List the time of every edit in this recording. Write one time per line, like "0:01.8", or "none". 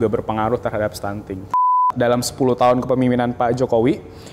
0:01.9

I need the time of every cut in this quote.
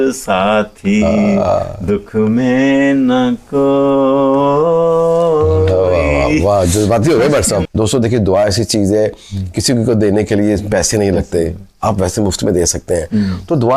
0:07.6

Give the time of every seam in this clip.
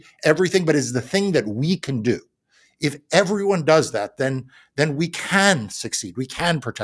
none

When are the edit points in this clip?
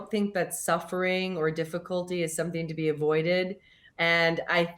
0:03.8

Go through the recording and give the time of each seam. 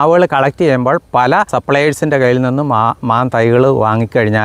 0:01.5

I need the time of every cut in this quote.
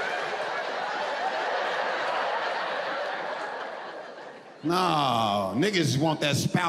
none

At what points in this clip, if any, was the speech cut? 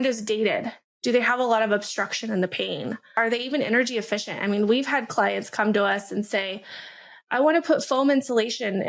0:03.2

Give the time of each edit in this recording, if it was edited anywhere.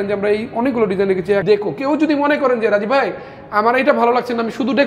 0:01.4

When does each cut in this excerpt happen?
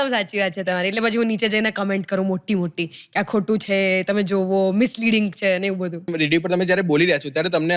0:06.1

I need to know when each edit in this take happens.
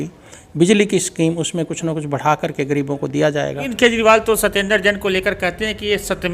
0:03.7

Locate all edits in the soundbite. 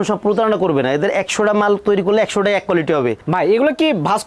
0:03.2

